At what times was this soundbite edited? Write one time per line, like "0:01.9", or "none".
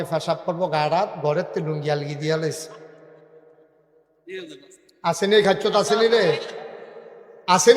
none